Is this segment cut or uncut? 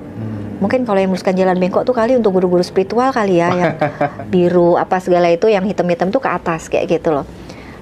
cut